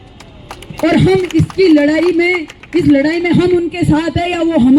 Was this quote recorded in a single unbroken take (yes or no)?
yes